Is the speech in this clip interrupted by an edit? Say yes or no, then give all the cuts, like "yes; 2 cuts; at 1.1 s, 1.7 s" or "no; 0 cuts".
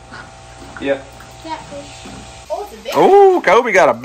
yes; 1 cut; at 2.3 s